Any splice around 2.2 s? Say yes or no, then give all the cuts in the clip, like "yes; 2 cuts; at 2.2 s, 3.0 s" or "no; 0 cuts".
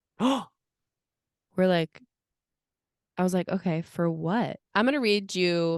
no; 1 cut; at 4.6 s